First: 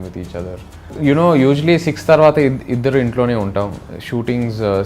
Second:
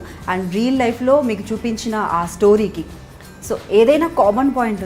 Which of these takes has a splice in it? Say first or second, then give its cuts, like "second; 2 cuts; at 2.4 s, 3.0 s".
first; 1 cut; at 0.9 s